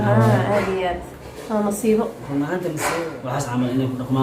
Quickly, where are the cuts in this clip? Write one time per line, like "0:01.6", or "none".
0:02.8